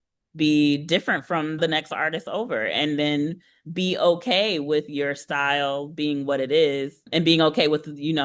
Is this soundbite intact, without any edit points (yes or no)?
no